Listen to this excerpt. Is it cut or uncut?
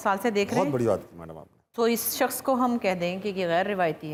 uncut